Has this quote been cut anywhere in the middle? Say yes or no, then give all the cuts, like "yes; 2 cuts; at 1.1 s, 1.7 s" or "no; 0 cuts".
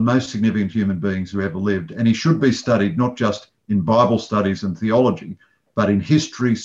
no; 0 cuts